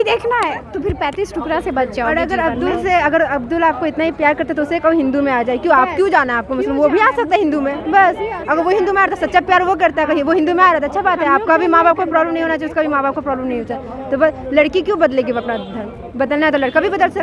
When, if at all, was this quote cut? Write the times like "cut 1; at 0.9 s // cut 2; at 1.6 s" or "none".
none